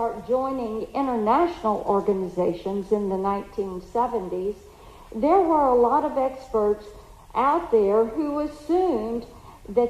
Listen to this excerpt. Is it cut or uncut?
uncut